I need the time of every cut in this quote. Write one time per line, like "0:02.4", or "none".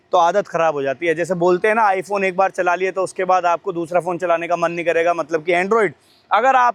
none